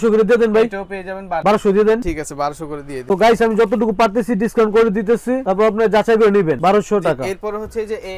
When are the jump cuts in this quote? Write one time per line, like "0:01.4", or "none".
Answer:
none

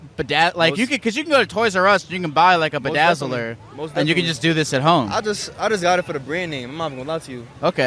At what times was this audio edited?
none

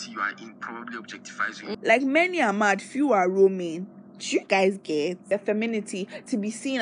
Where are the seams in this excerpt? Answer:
0:01.6
0:05.3

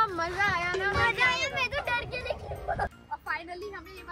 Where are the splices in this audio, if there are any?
0:02.9

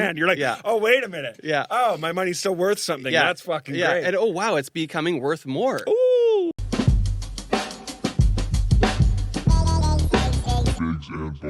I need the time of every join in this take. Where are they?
0:06.5

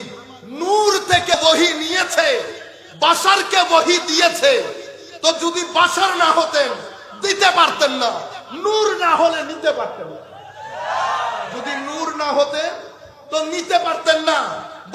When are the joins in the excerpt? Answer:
0:01.3

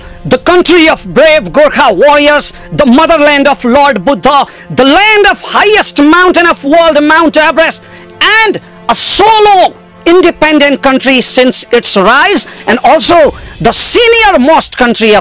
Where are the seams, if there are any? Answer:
none

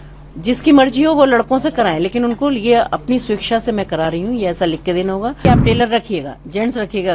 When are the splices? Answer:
0:05.4

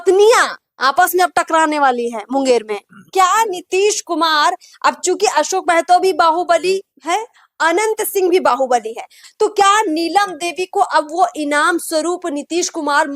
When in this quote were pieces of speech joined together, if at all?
0:03.1
0:09.2

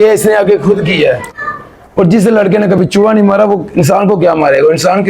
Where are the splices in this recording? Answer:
0:01.3

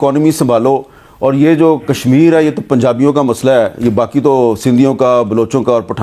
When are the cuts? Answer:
none

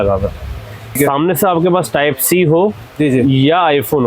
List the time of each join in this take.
0:01.0

